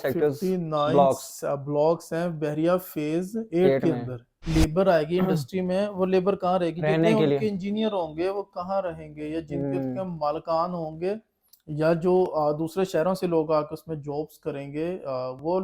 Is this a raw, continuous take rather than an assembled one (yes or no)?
no